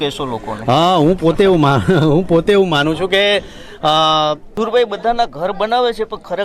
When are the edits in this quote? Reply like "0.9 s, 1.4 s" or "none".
4.5 s